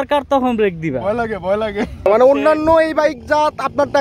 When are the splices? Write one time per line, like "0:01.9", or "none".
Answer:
0:02.1